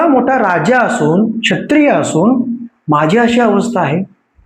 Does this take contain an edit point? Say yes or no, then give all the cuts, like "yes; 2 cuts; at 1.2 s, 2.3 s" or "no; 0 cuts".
no; 0 cuts